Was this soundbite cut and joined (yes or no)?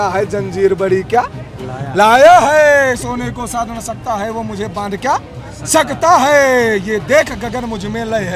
no